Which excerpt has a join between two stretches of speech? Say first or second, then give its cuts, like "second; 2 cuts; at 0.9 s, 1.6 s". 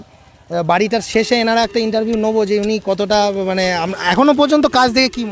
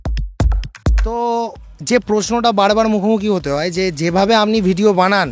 second; 1 cut; at 1.0 s